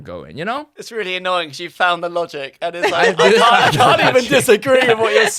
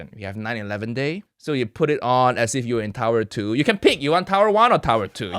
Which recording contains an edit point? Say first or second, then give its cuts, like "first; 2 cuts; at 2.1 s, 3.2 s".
second; 1 cut; at 1.3 s